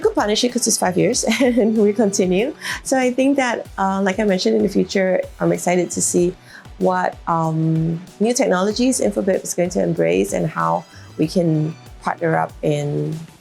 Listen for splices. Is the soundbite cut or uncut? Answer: uncut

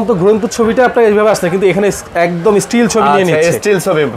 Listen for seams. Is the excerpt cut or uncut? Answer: uncut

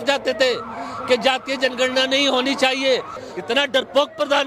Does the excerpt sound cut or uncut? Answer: cut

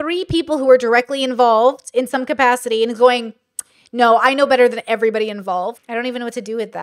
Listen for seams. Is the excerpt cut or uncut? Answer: cut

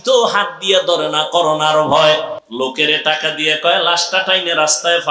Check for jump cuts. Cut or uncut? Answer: cut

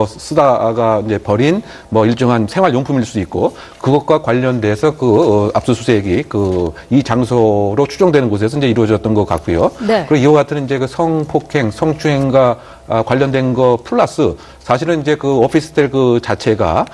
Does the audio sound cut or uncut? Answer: cut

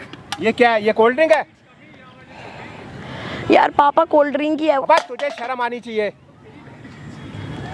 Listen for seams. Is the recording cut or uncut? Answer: uncut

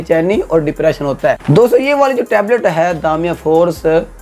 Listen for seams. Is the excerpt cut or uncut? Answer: uncut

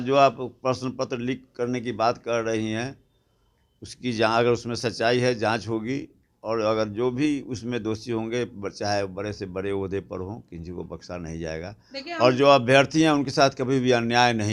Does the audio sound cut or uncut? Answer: uncut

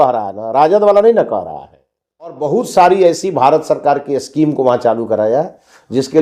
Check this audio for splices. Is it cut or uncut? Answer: cut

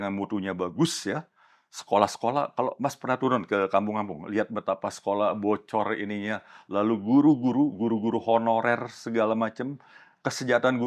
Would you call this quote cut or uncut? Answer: uncut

